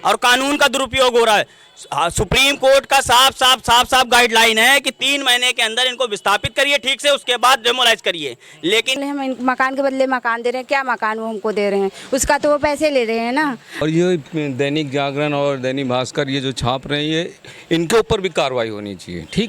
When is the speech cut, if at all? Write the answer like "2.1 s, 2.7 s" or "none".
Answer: 9.0 s, 13.8 s